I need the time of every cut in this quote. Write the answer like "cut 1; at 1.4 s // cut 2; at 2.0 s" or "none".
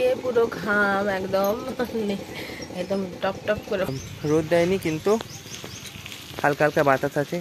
cut 1; at 3.9 s